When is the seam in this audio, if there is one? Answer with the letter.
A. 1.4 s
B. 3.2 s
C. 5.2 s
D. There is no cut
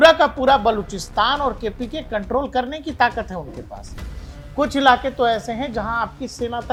D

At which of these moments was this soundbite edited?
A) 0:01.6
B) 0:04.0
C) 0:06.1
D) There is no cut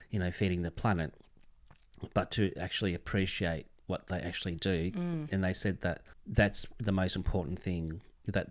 C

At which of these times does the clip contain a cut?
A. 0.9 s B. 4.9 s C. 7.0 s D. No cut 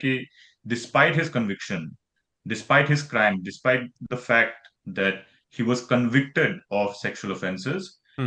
D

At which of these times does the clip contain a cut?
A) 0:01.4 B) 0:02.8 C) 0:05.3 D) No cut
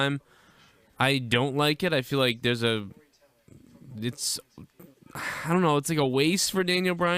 C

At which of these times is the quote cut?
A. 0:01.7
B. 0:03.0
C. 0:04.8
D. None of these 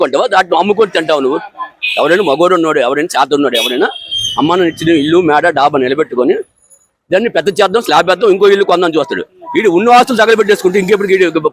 D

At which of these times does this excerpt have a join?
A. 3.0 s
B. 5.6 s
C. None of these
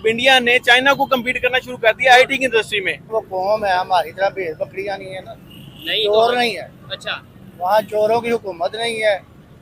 A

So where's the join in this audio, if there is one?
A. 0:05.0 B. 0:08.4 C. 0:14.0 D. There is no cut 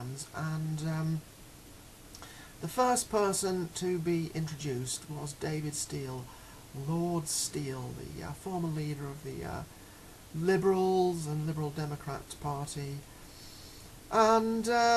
C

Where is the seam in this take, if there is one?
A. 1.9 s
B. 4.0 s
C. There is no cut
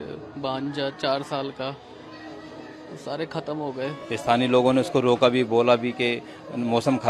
B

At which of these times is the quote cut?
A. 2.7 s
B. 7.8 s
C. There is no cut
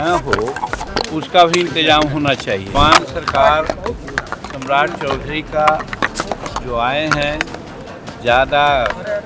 A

